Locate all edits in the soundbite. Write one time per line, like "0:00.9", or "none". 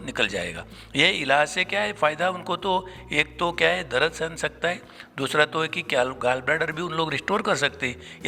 none